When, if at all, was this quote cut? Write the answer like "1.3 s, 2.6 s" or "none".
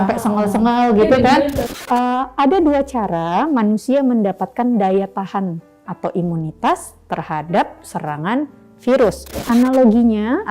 1.7 s, 9.3 s